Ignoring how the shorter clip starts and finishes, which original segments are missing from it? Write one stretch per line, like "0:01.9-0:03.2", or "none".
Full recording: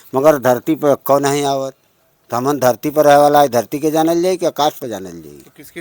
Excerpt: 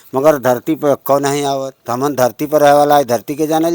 0:01.8-0:02.2